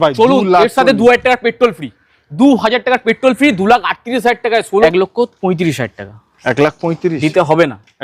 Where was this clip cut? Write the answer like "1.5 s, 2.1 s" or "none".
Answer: 4.8 s